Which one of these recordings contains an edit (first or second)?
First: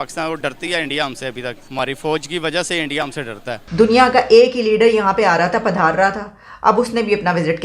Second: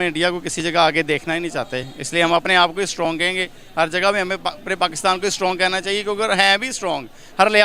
first